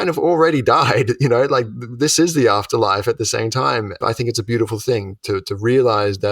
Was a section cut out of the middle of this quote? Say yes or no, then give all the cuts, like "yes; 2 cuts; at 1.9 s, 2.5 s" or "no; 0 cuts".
yes; 1 cut; at 4.0 s